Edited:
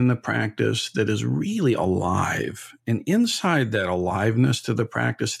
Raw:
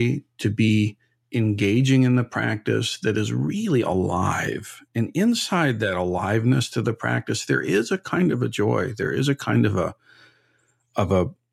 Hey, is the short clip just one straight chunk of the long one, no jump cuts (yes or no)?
yes